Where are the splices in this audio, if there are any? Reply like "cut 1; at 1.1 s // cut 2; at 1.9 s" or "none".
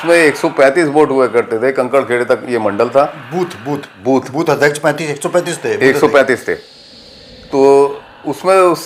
none